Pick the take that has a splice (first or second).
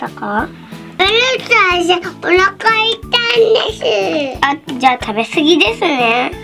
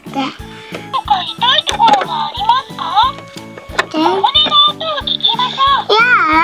first